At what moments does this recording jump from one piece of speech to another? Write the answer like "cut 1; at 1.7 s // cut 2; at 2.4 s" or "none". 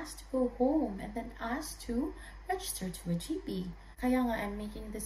cut 1; at 3.8 s